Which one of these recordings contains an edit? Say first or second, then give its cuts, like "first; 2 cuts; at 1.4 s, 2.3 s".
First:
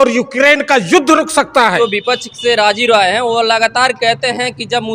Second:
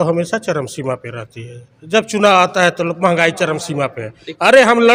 first; 1 cut; at 1.8 s